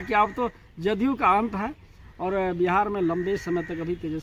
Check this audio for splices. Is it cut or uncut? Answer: uncut